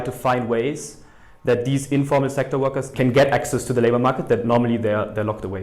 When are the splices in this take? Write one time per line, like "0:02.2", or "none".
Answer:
0:02.9